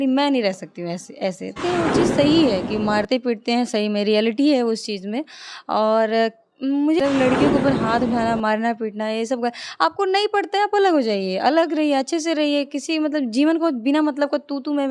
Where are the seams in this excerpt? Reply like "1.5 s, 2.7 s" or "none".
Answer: 1.6 s, 7.0 s

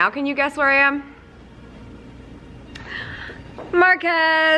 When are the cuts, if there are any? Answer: none

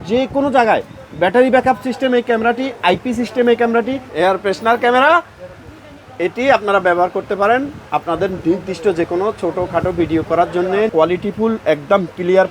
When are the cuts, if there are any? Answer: 4.0 s, 10.9 s

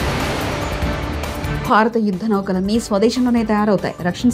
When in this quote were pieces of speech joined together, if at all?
1.3 s

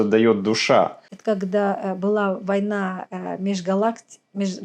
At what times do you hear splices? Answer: 1.1 s

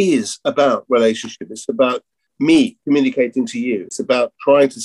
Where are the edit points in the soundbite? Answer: 2.3 s, 3.9 s

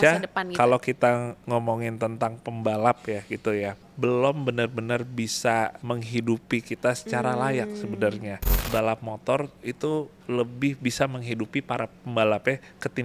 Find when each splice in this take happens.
1.3 s, 3.9 s, 5.8 s, 8.5 s

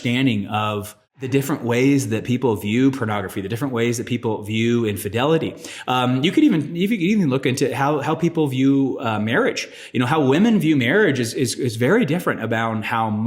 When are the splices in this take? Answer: 1.2 s

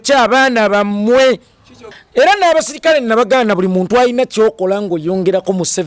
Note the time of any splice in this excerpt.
2.0 s

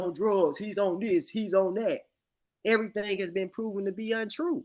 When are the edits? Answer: none

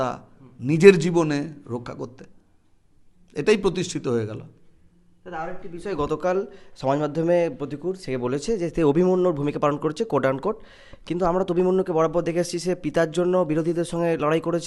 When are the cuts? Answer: none

